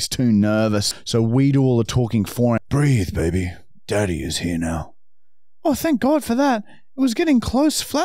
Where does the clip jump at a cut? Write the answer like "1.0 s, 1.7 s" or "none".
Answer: 0.9 s, 2.6 s